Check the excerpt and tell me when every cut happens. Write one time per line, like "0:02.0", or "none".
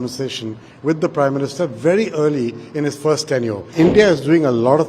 0:03.6